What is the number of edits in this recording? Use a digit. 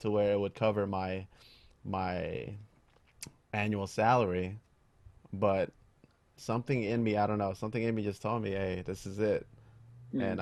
0